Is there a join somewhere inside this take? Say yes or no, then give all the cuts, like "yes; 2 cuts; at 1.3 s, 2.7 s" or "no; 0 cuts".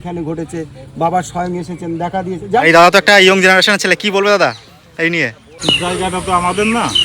yes; 2 cuts; at 2.6 s, 5.4 s